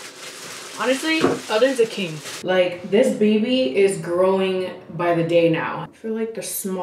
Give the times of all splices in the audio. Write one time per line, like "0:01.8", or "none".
0:02.3
0:05.8